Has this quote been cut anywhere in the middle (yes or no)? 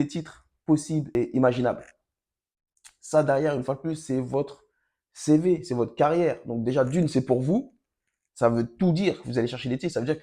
yes